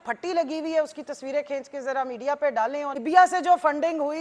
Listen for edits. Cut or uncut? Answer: uncut